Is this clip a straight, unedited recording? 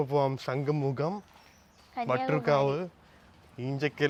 yes; 0 cuts

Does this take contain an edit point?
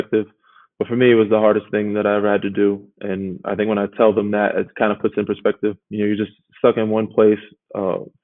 yes; 1 cut; at 5.8 s

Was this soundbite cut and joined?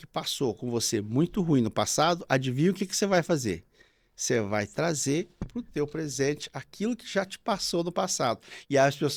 no; 0 cuts

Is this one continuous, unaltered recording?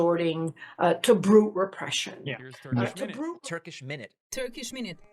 no; 1 cut; at 3.4 s

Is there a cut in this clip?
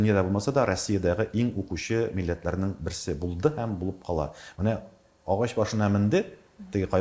yes; 1 cut; at 4.4 s

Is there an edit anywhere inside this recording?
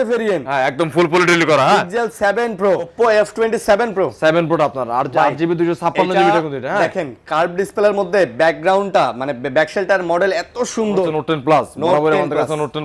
yes; 2 cuts; at 2.9 s, 11.1 s

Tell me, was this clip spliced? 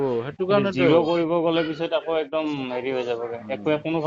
no; 0 cuts

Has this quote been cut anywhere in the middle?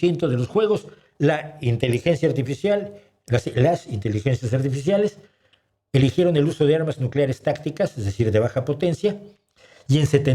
no; 0 cuts

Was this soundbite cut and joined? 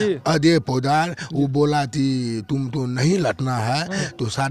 no; 0 cuts

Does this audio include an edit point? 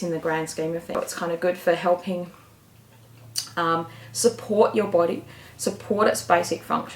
yes; 1 cut; at 1.0 s

